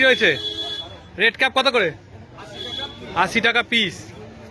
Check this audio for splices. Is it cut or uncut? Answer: uncut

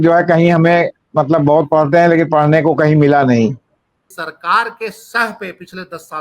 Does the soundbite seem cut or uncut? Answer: cut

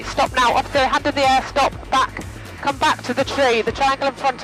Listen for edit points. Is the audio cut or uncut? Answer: uncut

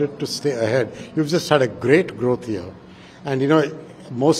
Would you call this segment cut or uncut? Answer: uncut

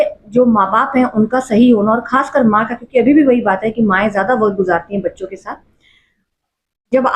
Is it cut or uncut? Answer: uncut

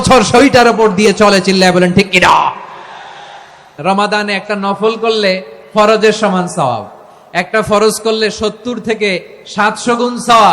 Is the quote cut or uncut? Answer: cut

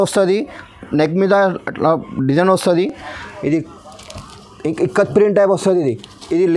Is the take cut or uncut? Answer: uncut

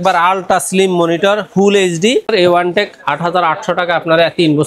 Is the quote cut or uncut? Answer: cut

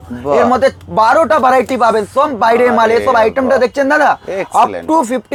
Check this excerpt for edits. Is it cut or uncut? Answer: uncut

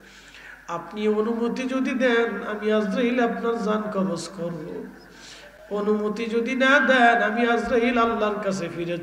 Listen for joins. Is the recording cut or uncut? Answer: uncut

